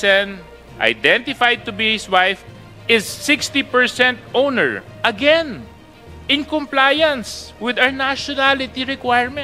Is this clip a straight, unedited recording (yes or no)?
no